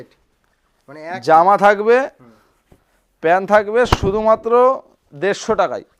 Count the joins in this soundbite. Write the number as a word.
zero